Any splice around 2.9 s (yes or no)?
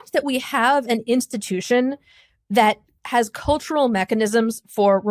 yes